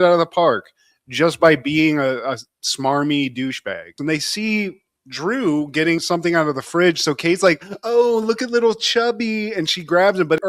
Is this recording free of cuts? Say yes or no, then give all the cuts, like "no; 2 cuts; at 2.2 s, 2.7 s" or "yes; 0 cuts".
no; 1 cut; at 4.0 s